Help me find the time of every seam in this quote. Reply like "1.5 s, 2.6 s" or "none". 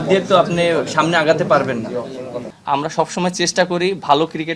2.5 s